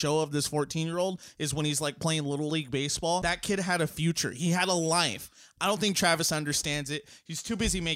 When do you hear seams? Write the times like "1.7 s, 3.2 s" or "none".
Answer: 3.2 s